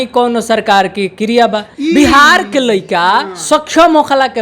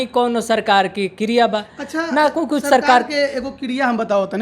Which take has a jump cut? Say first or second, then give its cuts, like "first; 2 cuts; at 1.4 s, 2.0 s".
first; 1 cut; at 1.7 s